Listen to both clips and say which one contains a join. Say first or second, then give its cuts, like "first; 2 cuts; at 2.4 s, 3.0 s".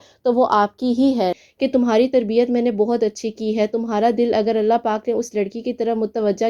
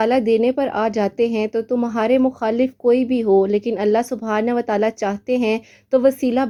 first; 1 cut; at 1.3 s